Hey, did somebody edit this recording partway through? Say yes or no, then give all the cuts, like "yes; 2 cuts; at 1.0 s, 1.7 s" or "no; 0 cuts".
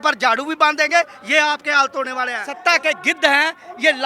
yes; 1 cut; at 2.4 s